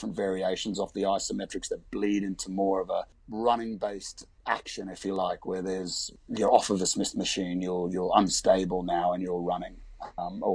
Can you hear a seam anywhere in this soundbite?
yes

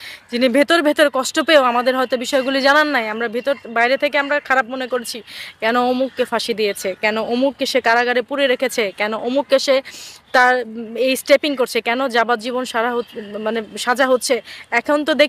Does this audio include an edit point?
no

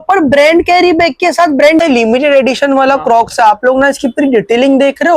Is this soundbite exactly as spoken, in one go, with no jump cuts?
no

